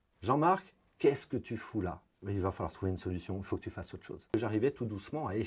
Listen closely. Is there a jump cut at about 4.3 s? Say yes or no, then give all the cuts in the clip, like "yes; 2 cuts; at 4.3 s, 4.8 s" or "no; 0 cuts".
yes; 2 cuts; at 2.2 s, 4.3 s